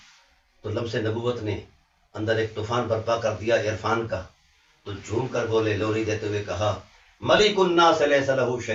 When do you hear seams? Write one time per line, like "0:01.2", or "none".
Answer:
none

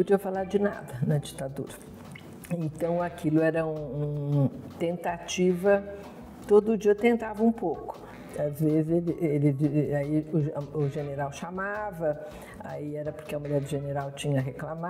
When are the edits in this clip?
none

